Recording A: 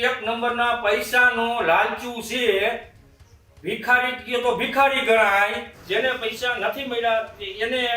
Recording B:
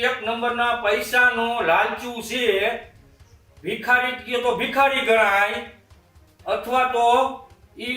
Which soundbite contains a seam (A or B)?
A